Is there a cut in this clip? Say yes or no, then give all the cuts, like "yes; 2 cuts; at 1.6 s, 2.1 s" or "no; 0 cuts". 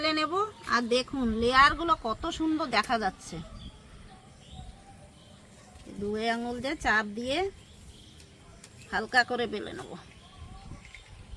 no; 0 cuts